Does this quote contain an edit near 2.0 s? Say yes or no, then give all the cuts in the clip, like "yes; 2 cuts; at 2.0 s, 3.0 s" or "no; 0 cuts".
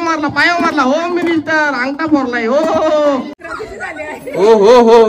no; 1 cut; at 3.3 s